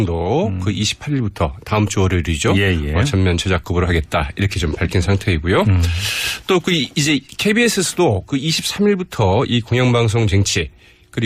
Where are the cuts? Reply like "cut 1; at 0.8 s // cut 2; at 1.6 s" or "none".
cut 1; at 6.4 s